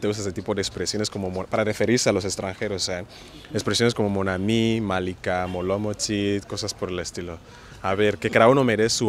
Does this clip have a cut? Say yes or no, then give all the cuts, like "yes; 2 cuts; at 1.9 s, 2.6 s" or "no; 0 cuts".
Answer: no; 0 cuts